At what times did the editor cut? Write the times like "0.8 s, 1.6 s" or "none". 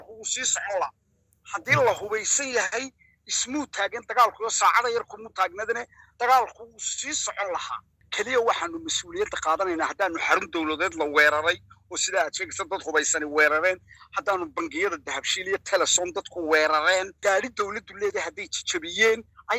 7.9 s, 17.1 s